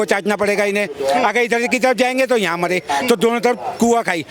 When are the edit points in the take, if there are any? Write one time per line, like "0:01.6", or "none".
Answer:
none